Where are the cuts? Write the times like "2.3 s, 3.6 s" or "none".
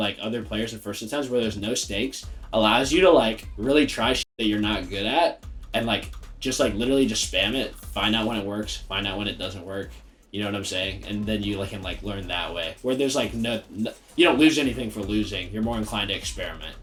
none